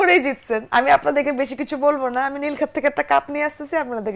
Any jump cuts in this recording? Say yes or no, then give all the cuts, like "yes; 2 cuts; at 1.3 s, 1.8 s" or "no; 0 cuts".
no; 0 cuts